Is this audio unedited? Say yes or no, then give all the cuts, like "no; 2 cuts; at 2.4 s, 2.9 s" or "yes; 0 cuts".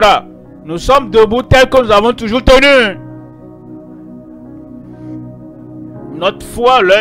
no; 2 cuts; at 3.1 s, 5.5 s